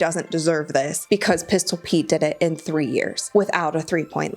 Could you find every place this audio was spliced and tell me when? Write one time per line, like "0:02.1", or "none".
0:01.0
0:03.2